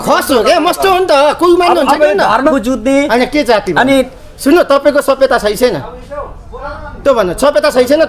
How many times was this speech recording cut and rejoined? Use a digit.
1